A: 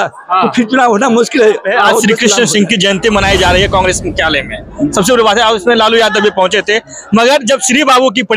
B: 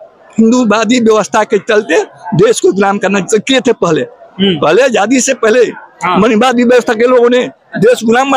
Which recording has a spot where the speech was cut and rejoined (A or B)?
A